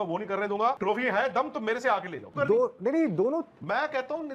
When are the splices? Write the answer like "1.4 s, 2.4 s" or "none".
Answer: 2.2 s